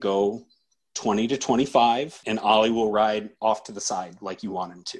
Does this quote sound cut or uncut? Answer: cut